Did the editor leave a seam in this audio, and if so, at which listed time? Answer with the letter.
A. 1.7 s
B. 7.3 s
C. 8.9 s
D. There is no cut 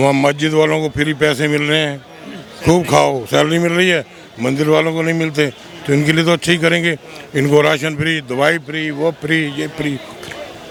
D